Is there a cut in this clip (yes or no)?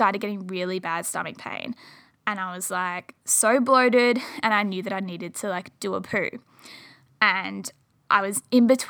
no